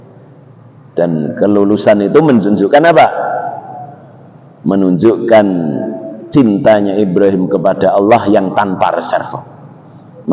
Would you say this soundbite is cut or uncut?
uncut